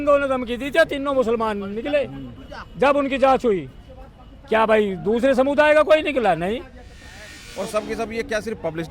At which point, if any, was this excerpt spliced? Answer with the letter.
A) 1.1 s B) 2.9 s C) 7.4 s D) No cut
C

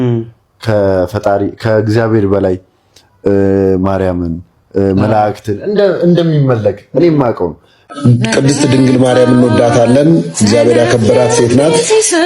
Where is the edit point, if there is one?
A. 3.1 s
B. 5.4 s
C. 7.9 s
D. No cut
C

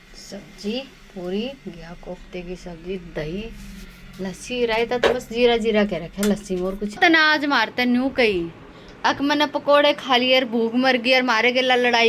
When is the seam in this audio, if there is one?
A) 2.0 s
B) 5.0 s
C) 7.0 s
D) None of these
C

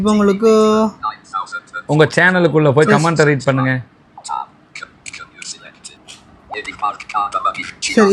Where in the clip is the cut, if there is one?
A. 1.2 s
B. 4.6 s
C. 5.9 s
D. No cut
C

